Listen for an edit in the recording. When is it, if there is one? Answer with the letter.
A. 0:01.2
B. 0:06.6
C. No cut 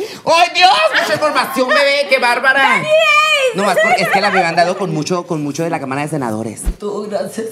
B